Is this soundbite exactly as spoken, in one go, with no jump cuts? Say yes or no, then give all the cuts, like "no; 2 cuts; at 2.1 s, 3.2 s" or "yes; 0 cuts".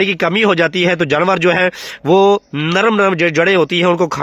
yes; 0 cuts